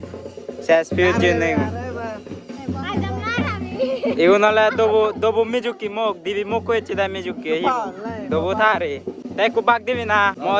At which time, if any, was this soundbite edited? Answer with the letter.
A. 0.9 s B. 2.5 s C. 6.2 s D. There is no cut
D